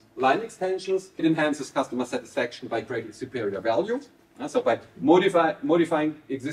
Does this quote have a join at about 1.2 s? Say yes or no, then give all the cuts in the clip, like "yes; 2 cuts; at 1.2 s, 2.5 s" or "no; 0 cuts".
yes; 1 cut; at 1.2 s